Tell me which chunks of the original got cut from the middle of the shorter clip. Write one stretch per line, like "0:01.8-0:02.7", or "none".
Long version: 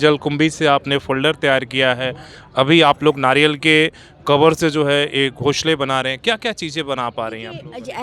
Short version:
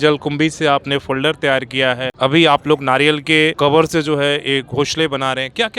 0:02.1-0:02.4
0:03.9-0:04.2